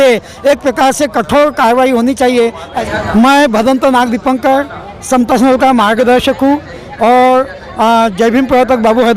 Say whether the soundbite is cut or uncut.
cut